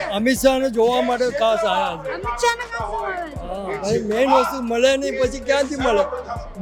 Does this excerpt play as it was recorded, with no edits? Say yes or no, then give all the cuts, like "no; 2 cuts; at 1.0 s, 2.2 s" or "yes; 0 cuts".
yes; 0 cuts